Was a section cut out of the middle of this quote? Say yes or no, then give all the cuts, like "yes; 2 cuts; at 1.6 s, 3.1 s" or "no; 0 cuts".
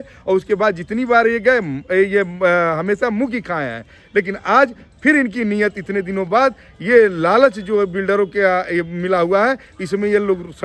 no; 0 cuts